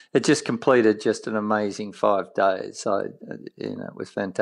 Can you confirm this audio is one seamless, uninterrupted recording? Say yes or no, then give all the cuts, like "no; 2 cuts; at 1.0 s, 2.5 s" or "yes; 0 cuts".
yes; 0 cuts